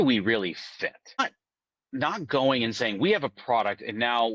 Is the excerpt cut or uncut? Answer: cut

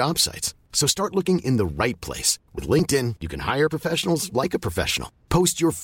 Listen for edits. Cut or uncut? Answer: uncut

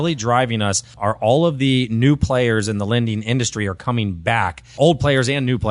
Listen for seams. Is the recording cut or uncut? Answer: cut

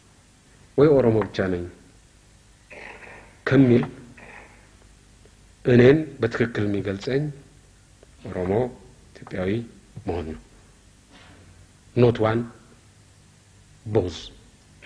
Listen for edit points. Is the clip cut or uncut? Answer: uncut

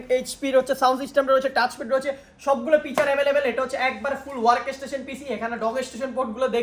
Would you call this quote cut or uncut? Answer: uncut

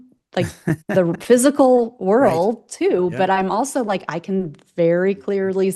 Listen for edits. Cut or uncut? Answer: uncut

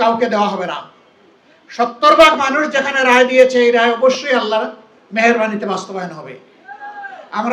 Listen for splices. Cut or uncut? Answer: uncut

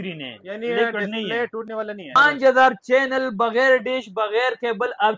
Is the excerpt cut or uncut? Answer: cut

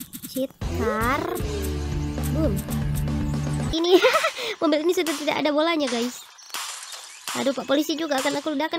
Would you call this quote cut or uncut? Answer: cut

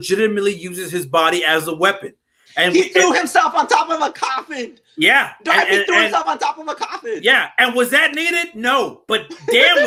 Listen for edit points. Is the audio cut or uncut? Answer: uncut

